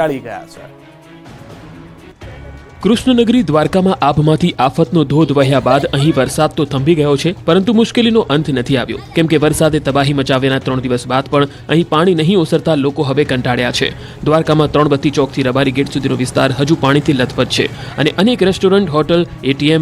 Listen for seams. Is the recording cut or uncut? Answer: uncut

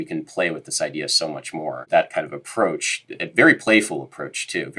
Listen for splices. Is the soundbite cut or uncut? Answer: cut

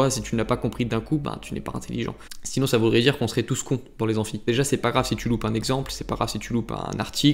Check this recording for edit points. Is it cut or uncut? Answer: uncut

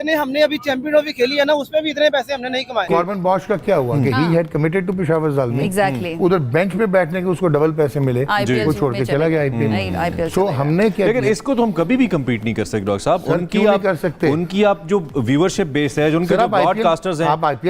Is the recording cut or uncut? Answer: cut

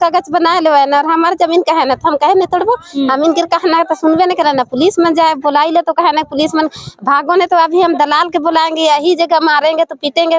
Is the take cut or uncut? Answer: uncut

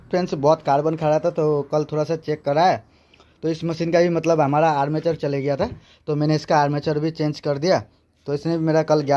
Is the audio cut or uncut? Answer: uncut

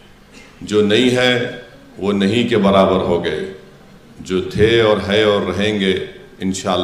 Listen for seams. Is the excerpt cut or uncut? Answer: uncut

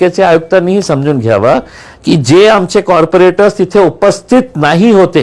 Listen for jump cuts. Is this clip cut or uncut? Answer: uncut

